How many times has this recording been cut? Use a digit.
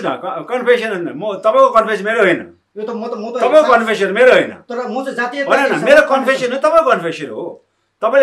0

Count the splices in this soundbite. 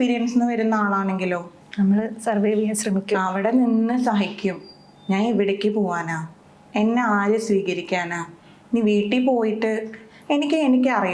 0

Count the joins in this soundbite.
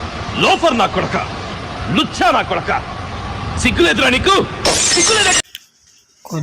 1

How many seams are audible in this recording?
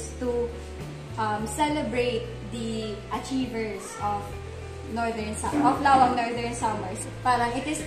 1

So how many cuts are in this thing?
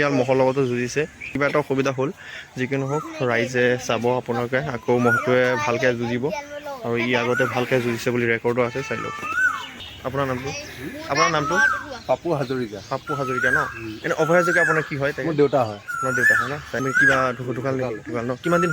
4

